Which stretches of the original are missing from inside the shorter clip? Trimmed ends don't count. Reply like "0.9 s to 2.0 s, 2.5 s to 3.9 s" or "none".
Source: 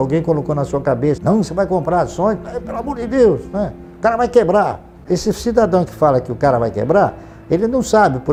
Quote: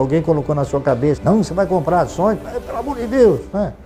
none